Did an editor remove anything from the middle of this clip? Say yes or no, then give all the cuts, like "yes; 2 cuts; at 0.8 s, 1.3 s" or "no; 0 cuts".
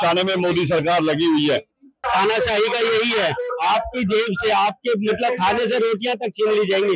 yes; 1 cut; at 2.1 s